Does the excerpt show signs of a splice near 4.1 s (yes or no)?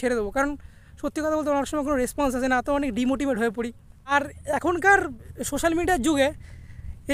yes